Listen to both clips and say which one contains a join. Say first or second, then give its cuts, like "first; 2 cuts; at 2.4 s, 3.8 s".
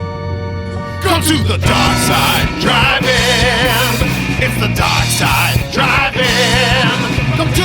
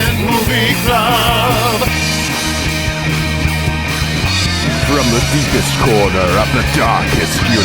second; 1 cut; at 1.9 s